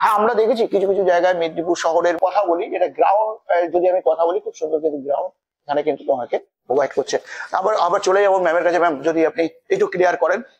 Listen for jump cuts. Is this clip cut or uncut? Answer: cut